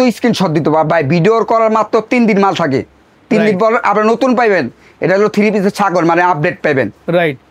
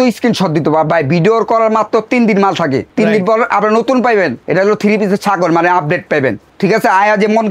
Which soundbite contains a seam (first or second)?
second